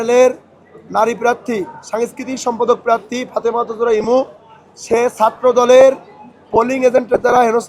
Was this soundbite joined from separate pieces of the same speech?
no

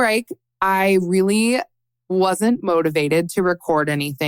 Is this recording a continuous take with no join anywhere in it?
yes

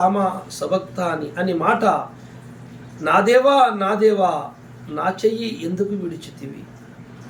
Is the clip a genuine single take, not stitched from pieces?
yes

